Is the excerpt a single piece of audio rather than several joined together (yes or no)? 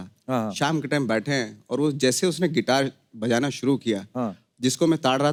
yes